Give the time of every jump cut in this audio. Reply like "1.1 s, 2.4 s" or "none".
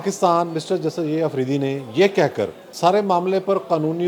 2.6 s